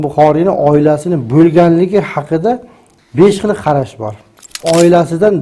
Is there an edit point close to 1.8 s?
no; 1 cut; at 4.5 s

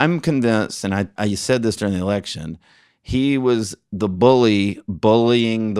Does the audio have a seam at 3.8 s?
no; 1 cut; at 1.1 s

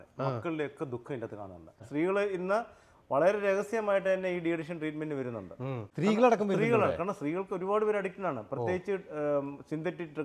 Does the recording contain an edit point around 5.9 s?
yes; 2 cuts; at 1.8 s, 5.9 s

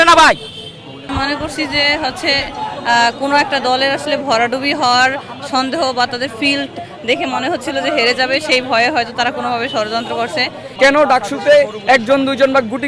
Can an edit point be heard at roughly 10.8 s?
yes; 2 cuts; at 1.1 s, 10.8 s

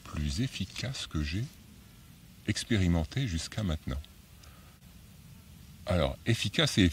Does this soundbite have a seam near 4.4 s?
no; 0 cuts

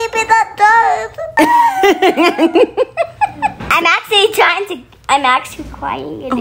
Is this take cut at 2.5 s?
no; 0 cuts

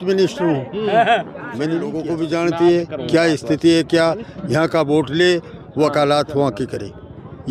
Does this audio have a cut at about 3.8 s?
no; 1 cut; at 2.0 s

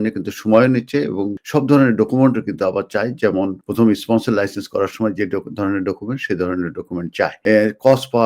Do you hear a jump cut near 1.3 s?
yes; 3 cuts; at 1.3 s, 3.6 s, 7.4 s

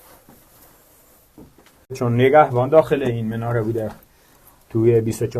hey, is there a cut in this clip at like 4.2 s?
no; 1 cut; at 2.0 s

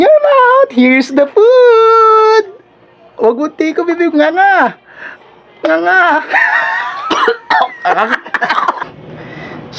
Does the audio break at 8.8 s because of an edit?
yes; 1 cut; at 8.8 s

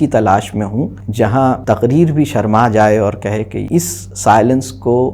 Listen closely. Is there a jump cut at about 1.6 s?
yes; 3 cuts; at 1.0 s, 1.6 s, 3.6 s

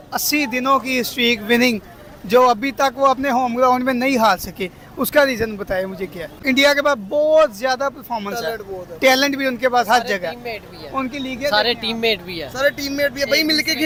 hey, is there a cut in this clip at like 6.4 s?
no; 0 cuts

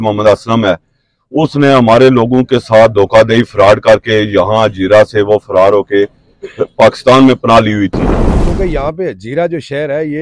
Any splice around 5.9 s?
no; 1 cut; at 8.5 s

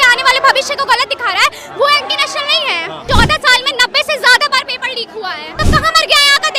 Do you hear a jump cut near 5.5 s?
yes; 2 cuts; at 3.0 s, 5.5 s

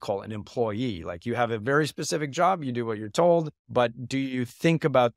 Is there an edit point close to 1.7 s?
no; 1 cut; at 3.6 s

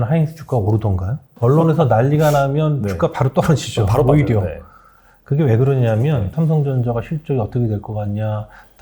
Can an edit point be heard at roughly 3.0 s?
no; 2 cuts; at 1.3 s, 6.3 s

